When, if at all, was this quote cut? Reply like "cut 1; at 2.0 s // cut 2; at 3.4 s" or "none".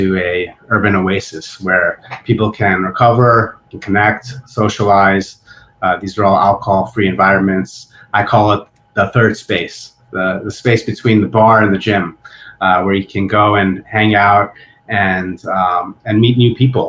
cut 1; at 3.7 s